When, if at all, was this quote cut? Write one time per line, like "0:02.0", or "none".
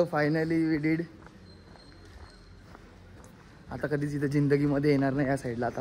none